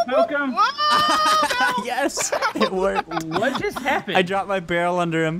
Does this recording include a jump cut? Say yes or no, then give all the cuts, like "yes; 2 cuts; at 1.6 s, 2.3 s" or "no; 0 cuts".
no; 0 cuts